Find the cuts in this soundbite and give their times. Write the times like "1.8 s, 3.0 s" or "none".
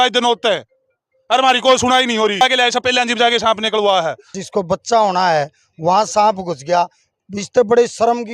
2.4 s, 4.4 s

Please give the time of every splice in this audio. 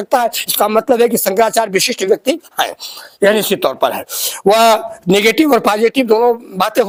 none

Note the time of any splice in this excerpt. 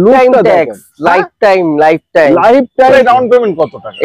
2.9 s

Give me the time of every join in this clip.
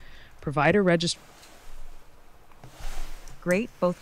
1.1 s

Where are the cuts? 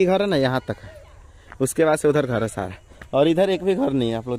none

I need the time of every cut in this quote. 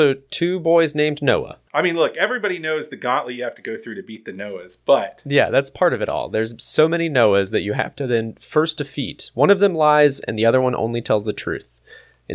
1.6 s

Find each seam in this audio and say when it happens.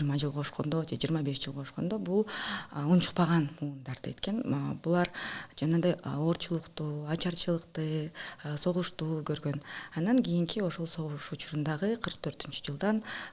none

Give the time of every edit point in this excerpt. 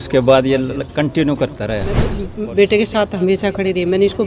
2.3 s

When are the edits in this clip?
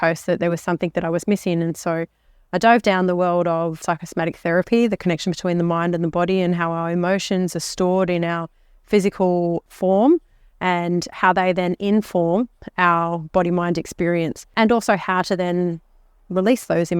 3.8 s, 9.6 s, 14.5 s

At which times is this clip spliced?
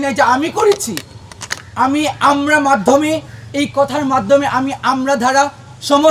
none

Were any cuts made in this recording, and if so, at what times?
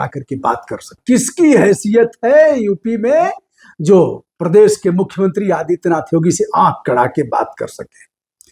0.9 s

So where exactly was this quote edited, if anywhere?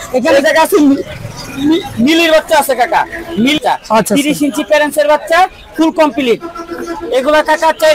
3.6 s

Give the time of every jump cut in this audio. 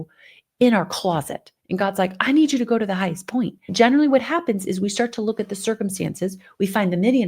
3.6 s

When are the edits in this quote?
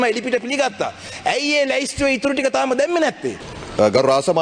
3.5 s

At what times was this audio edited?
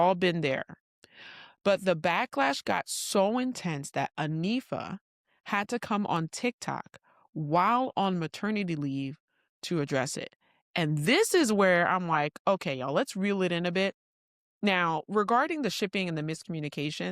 none

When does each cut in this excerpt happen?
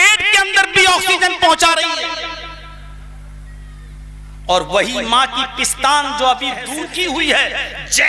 6.7 s

